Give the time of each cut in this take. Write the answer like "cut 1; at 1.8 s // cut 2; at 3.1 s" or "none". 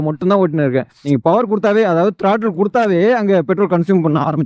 cut 1; at 0.9 s